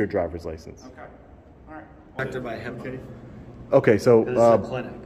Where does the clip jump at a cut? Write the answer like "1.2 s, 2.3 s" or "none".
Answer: 2.2 s